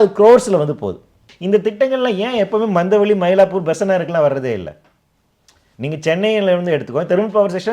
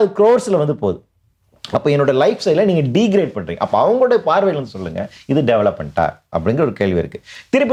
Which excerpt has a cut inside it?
first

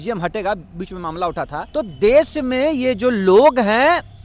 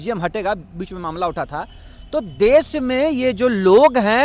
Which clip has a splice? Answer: first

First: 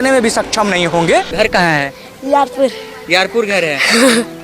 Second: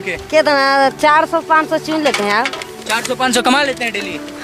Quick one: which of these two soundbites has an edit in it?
first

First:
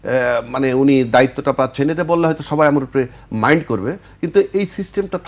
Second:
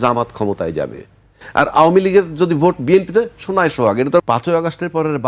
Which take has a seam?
second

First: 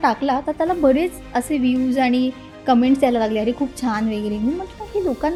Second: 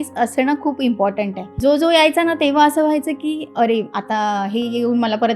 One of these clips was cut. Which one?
second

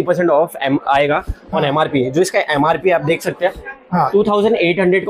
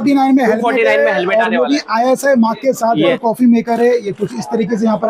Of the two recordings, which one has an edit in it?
second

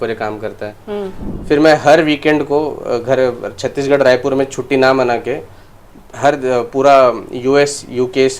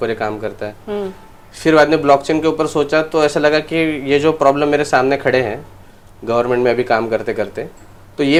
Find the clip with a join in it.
first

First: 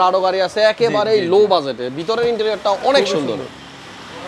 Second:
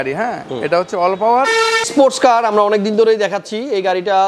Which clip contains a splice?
second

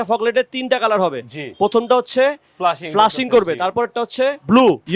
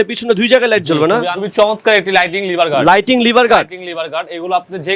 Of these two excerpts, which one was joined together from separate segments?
second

